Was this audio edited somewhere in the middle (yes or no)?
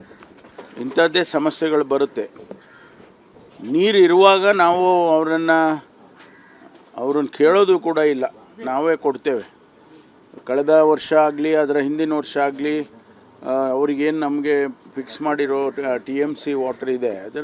no